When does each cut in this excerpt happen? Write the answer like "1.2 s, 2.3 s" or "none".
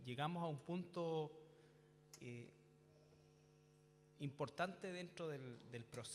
2.0 s